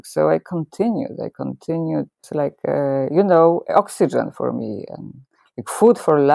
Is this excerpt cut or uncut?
cut